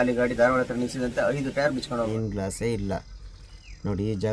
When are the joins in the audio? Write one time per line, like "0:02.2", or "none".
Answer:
0:02.1